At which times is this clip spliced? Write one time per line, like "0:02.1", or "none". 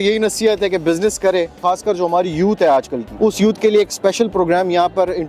0:01.5
0:03.0